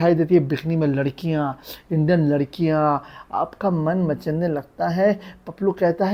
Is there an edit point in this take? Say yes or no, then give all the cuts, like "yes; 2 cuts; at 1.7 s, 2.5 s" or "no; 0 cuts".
no; 0 cuts